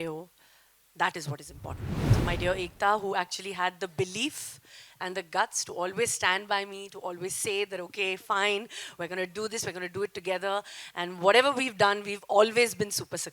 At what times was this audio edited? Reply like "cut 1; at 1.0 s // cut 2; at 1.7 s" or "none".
cut 1; at 2.0 s